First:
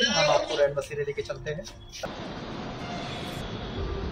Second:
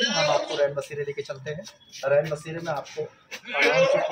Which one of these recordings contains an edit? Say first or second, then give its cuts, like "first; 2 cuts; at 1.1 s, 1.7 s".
first; 1 cut; at 2.0 s